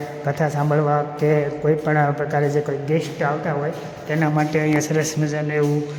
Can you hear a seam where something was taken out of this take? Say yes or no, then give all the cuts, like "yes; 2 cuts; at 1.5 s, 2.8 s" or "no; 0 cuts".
no; 0 cuts